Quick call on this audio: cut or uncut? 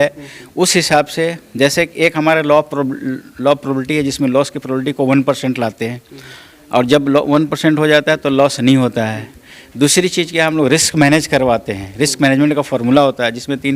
uncut